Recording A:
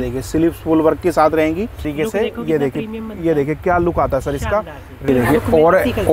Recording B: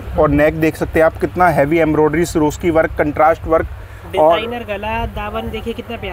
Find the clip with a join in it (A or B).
A